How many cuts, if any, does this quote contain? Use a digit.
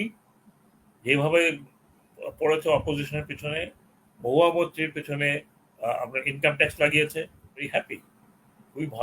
1